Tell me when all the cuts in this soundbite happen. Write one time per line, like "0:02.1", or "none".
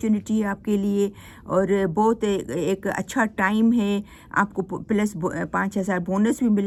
none